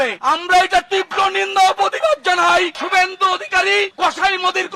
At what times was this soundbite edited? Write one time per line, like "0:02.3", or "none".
0:02.8